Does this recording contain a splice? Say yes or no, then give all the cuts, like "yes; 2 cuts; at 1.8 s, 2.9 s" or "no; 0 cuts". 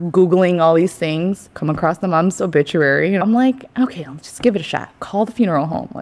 yes; 2 cuts; at 1.5 s, 3.2 s